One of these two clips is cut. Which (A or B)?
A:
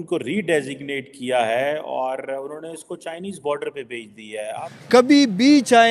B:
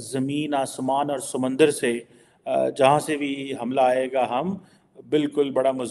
A